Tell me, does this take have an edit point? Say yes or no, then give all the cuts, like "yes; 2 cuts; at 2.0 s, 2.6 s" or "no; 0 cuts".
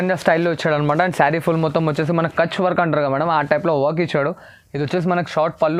no; 0 cuts